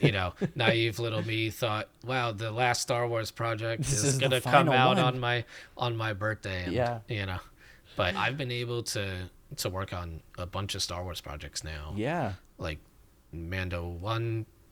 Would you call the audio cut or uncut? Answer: uncut